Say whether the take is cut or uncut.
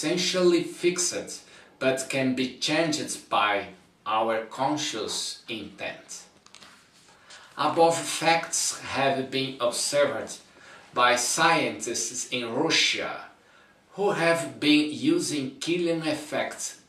cut